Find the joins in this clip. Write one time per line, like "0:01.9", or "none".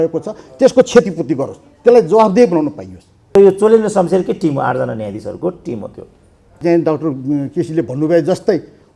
0:03.4
0:06.6

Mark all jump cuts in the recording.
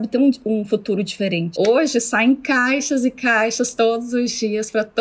0:01.5

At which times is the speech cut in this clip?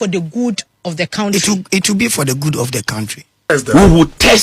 0:03.4

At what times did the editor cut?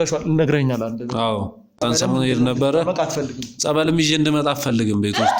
0:01.8

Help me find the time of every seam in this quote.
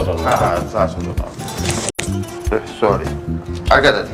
none

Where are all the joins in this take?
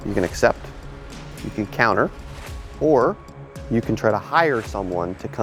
none

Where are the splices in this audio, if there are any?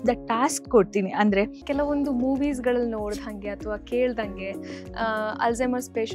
0:01.6

